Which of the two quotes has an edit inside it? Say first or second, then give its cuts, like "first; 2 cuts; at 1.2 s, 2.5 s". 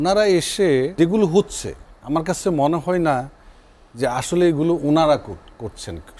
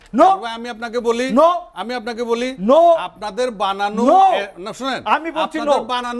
first; 1 cut; at 0.9 s